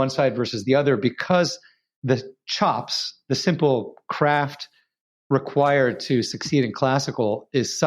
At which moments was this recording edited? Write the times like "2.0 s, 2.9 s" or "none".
2.0 s